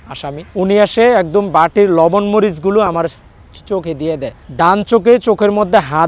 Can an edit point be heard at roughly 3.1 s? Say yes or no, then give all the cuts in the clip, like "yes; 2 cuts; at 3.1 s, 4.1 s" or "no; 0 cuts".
no; 1 cut; at 4.4 s